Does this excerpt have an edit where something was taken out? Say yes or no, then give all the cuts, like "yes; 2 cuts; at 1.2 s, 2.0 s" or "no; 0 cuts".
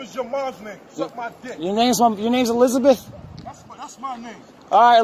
no; 0 cuts